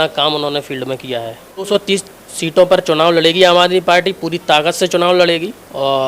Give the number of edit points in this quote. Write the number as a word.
one